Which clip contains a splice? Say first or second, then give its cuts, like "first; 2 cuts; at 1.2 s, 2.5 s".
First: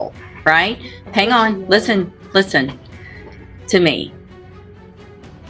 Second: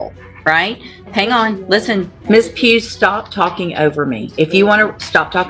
second; 1 cut; at 2.1 s